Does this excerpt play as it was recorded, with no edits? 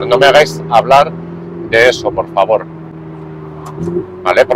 yes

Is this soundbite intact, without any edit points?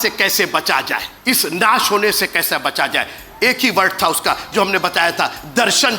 no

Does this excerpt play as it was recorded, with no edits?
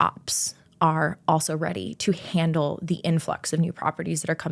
yes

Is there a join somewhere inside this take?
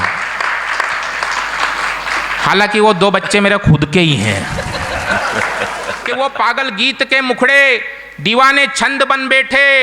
yes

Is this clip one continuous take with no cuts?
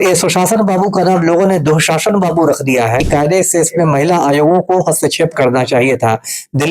no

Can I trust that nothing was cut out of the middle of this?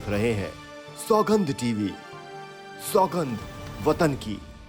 yes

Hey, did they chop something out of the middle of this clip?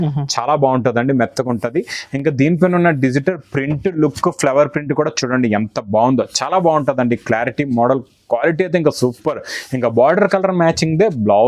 no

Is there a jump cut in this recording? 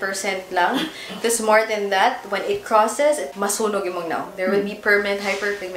yes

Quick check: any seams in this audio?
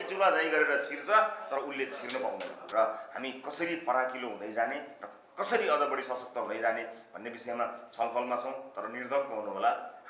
yes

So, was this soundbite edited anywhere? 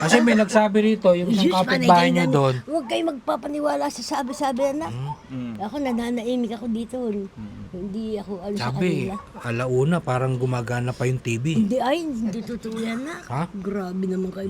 no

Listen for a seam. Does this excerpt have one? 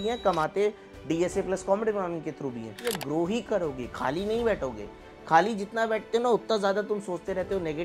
yes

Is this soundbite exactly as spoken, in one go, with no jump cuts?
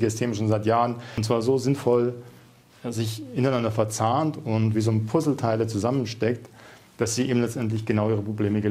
no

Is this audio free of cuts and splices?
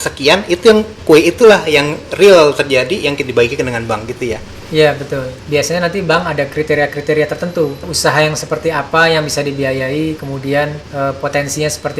no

